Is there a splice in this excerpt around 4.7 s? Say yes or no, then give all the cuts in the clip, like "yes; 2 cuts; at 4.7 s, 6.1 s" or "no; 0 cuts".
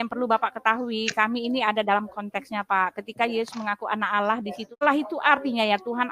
yes; 1 cut; at 4.7 s